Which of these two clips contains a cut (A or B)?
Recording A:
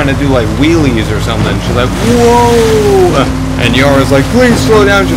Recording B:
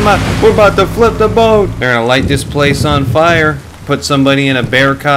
B